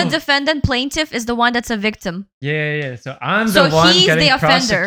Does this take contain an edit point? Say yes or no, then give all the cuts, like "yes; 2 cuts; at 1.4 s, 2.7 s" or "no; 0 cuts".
no; 0 cuts